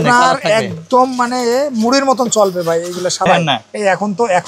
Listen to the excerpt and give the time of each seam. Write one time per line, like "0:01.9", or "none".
0:03.3